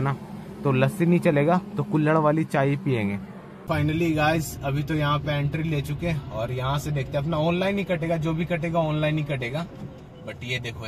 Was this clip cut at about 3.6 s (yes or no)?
yes